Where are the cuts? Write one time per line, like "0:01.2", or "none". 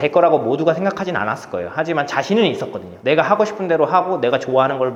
none